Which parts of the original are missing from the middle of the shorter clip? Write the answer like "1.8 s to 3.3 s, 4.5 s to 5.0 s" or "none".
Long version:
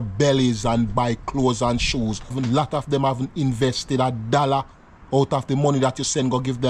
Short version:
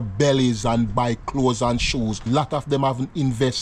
2.2 s to 2.5 s